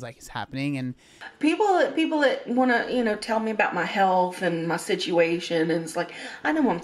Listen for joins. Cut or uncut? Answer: cut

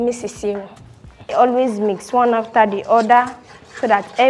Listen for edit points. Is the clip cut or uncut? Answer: cut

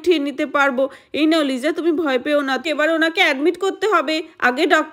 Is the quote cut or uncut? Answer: cut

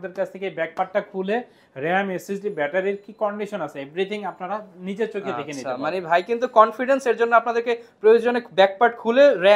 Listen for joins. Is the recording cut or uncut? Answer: uncut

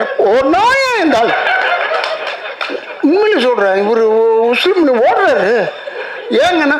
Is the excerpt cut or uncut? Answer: uncut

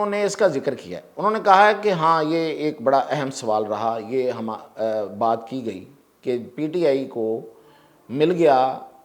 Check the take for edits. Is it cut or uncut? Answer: uncut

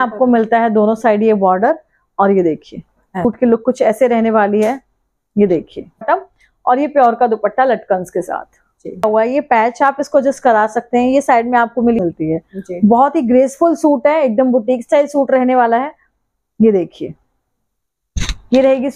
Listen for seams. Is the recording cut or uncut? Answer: cut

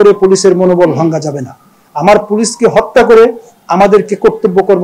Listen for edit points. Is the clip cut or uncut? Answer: uncut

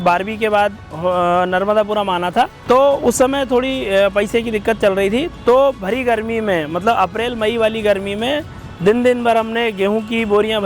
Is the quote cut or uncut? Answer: cut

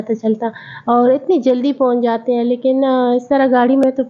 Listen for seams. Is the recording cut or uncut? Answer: uncut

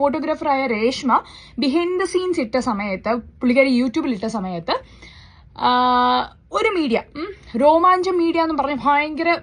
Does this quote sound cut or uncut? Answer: uncut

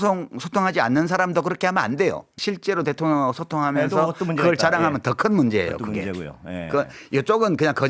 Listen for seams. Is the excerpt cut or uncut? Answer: cut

